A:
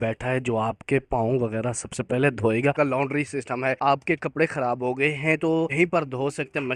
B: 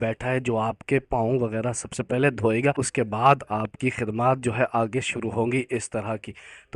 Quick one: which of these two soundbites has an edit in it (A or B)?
A